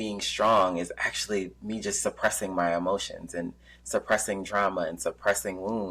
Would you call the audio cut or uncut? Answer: uncut